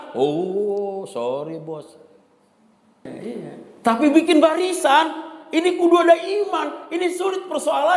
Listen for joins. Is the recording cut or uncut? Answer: cut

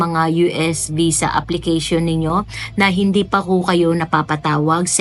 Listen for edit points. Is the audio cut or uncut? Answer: uncut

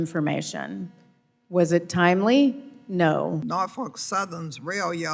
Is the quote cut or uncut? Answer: cut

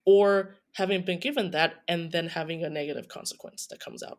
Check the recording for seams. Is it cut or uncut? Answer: uncut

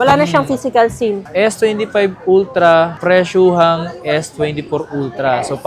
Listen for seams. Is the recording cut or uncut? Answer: cut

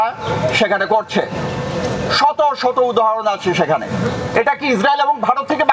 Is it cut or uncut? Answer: cut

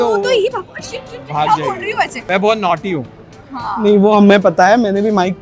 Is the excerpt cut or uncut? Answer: cut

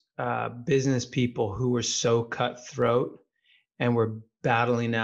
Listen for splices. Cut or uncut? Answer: uncut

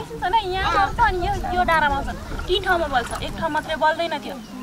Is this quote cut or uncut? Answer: uncut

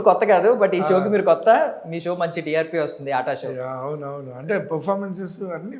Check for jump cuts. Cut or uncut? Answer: uncut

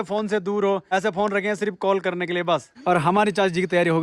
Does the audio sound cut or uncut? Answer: cut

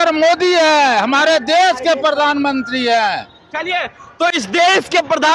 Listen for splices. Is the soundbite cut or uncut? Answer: uncut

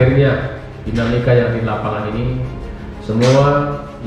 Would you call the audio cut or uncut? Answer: uncut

